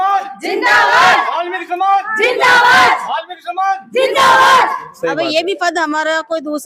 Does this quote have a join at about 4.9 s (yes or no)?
yes